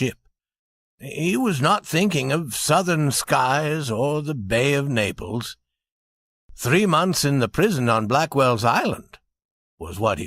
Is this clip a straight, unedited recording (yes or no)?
no